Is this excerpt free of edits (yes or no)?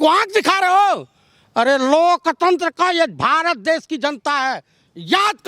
yes